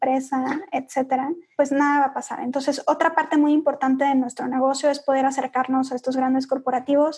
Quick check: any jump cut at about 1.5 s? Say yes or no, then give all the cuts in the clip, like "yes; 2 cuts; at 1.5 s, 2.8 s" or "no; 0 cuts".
yes; 1 cut; at 1.5 s